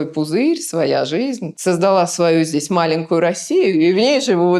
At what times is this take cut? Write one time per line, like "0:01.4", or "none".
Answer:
0:01.5